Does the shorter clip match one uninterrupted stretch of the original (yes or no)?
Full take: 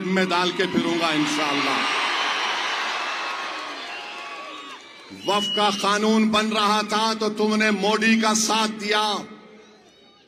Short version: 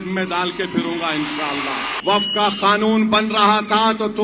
no